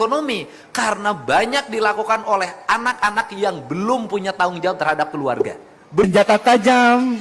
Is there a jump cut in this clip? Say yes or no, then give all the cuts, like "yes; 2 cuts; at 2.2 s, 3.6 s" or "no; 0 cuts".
yes; 1 cut; at 6.1 s